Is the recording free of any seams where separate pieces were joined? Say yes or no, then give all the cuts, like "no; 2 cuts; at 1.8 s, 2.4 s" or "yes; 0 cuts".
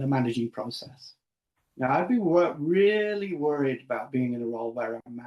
yes; 0 cuts